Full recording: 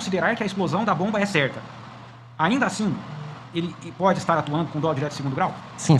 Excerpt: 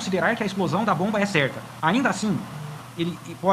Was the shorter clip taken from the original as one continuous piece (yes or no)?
no